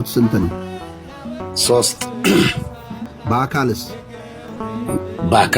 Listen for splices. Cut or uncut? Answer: cut